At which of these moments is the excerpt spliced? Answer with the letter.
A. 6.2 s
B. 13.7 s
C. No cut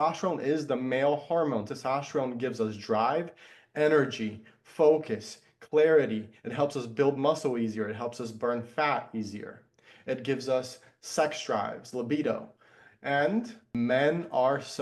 B